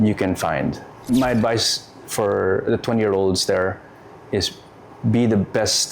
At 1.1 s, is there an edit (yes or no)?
yes